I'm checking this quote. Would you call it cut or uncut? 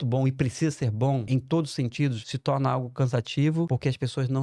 cut